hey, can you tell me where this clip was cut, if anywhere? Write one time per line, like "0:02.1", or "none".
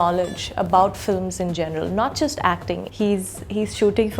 0:02.9